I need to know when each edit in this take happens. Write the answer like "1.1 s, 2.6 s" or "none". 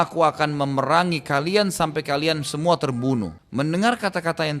3.4 s